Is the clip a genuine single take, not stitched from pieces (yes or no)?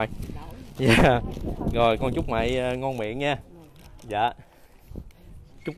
yes